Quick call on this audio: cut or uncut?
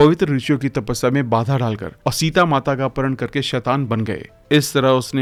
uncut